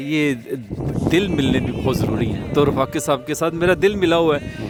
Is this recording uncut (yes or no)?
yes